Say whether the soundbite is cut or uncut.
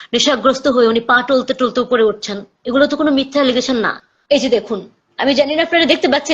cut